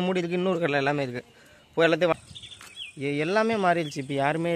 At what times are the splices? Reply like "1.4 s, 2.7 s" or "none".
2.2 s